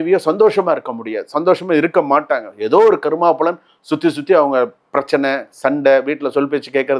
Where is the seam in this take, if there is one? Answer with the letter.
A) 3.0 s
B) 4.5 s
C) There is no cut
C